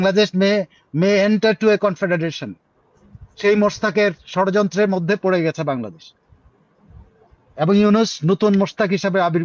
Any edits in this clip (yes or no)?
no